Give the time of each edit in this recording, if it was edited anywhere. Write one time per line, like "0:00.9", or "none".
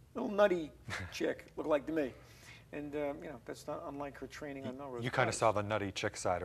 none